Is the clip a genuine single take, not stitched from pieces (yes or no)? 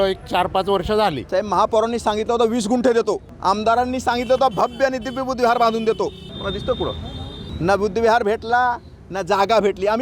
no